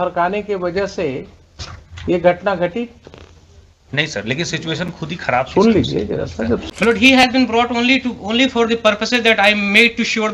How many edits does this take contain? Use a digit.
1